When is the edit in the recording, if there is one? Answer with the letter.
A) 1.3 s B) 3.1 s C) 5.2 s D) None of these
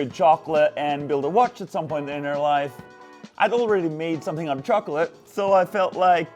C